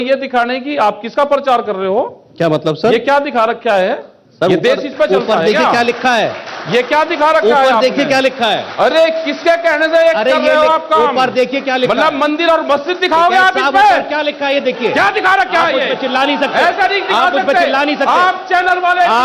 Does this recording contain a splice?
no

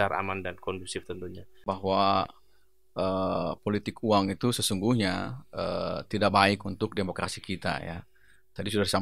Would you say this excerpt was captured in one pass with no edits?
no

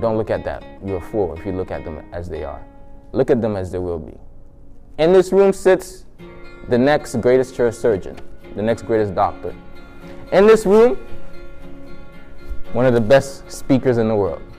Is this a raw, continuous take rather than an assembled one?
yes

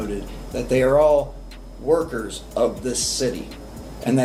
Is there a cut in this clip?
no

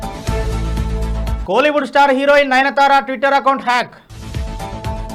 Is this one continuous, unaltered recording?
yes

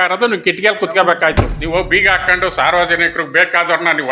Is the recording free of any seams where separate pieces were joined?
no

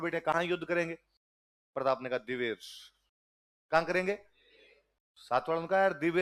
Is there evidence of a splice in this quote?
no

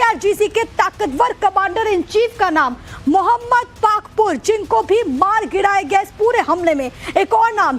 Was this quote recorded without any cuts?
no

